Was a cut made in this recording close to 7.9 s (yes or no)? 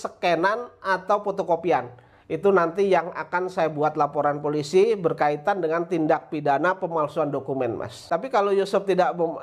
yes